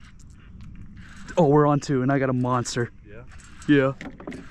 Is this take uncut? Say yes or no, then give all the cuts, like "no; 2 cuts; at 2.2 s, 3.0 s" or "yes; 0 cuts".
yes; 0 cuts